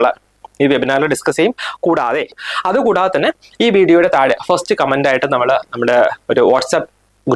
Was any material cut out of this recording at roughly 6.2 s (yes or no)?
no